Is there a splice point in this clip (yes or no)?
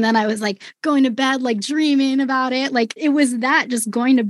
yes